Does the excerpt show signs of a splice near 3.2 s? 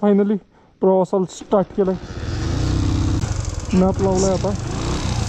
yes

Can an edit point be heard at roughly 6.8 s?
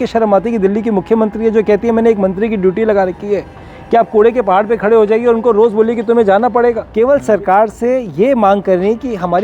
yes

